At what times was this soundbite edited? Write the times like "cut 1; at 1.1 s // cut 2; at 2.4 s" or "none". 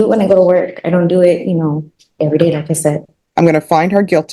cut 1; at 3.1 s